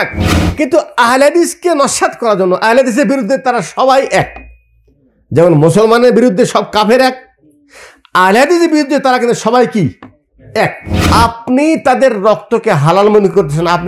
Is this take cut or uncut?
cut